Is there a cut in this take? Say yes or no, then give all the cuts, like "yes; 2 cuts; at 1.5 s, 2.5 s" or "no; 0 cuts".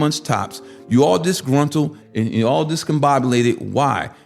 yes; 1 cut; at 2.0 s